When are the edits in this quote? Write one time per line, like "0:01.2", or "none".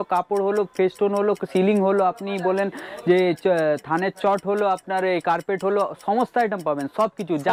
none